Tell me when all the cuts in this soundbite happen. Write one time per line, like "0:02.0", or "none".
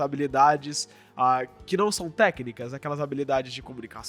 none